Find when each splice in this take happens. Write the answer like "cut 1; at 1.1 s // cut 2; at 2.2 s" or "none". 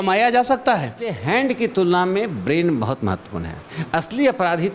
cut 1; at 1.2 s